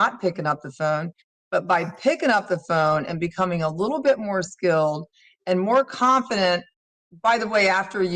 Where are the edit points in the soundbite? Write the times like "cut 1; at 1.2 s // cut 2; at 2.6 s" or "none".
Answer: none

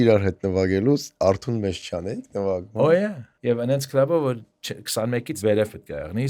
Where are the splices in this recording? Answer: cut 1; at 3.3 s // cut 2; at 5.3 s

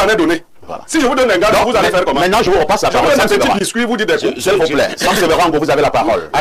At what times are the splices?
none

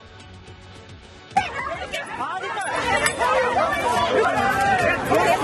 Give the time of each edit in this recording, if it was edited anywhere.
none

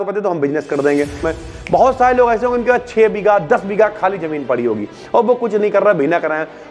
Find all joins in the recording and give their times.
cut 1; at 1.3 s

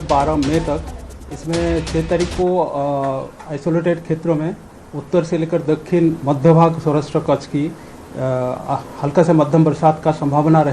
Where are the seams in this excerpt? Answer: none

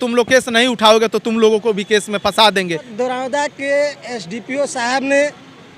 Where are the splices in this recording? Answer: cut 1; at 2.9 s

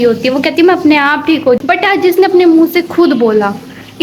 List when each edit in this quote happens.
cut 1; at 1.6 s

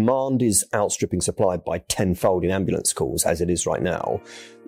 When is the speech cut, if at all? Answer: none

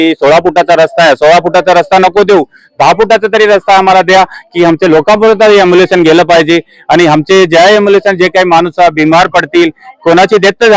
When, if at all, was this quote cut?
none

